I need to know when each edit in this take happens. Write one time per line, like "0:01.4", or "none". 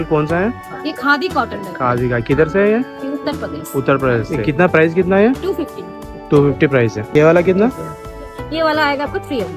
0:04.3
0:07.1